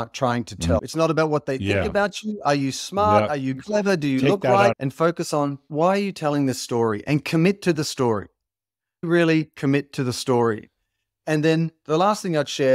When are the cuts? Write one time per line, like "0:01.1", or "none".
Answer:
0:00.9
0:04.8

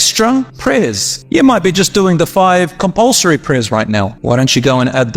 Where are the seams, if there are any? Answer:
0:00.9

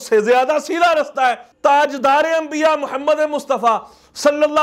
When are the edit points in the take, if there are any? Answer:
0:01.5

